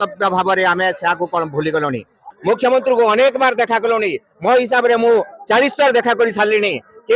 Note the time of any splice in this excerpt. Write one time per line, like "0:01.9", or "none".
0:02.1